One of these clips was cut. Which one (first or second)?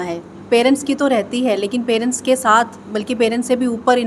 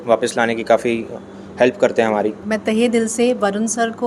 second